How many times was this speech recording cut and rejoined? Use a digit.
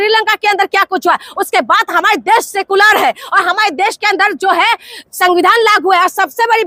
0